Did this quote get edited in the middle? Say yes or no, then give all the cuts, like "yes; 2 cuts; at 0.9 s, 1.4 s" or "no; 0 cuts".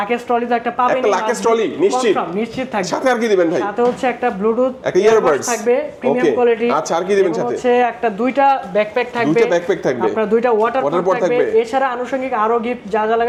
no; 0 cuts